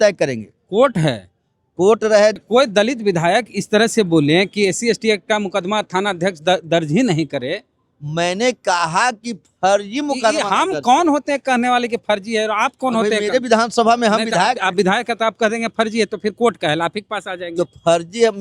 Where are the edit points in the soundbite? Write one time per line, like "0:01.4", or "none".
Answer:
0:02.4